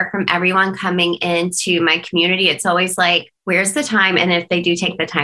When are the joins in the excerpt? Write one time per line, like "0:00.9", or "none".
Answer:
0:03.3